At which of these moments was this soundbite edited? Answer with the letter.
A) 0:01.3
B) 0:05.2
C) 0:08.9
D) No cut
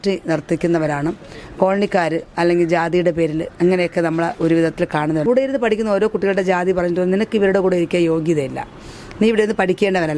B